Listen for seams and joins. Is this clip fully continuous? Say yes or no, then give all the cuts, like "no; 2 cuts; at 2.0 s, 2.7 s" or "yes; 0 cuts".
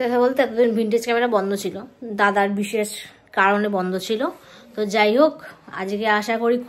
yes; 0 cuts